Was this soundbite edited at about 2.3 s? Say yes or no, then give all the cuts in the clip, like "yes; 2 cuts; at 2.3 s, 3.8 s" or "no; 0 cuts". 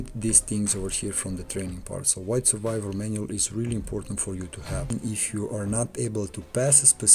no; 1 cut; at 4.9 s